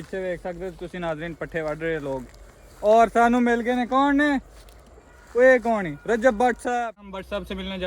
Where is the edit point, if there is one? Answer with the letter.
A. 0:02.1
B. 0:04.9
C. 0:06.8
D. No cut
C